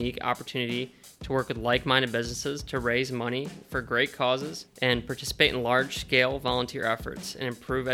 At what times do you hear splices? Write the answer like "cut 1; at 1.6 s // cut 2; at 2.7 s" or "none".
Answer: cut 1; at 4.6 s